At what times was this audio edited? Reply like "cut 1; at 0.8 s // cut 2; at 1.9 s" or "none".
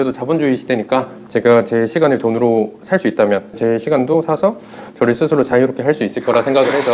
cut 1; at 1.2 s // cut 2; at 3.5 s